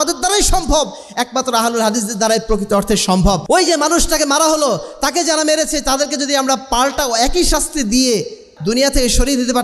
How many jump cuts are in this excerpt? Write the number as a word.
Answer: two